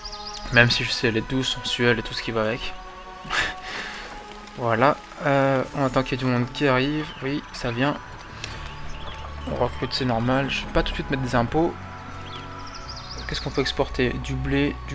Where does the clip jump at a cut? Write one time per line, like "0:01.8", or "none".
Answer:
none